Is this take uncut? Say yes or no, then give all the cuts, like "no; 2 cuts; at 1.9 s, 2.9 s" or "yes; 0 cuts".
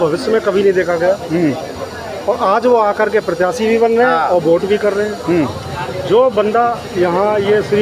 yes; 0 cuts